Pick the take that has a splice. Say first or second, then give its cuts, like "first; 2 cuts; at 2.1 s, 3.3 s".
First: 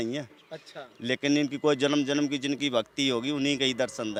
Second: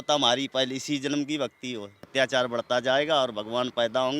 second; 1 cut; at 2.1 s